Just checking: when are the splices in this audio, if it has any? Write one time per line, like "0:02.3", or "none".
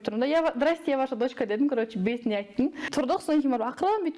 0:02.9